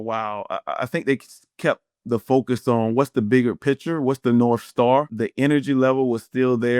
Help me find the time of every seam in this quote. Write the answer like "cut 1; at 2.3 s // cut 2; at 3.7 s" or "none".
cut 1; at 5.1 s